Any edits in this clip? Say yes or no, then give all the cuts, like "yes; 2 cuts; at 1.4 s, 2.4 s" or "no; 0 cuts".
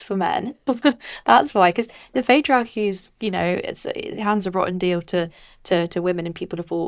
no; 0 cuts